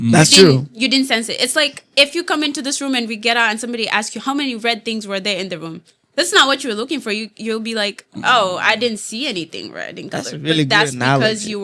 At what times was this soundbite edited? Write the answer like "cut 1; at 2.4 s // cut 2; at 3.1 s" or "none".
none